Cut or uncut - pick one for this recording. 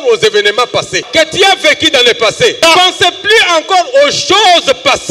cut